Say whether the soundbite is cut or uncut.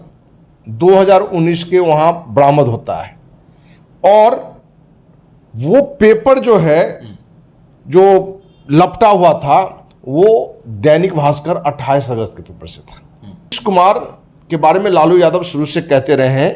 cut